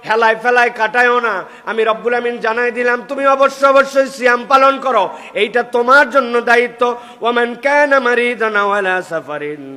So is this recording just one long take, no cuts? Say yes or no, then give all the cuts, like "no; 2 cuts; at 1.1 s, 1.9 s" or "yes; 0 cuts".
yes; 0 cuts